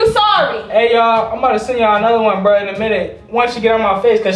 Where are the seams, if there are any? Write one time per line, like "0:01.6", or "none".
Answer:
none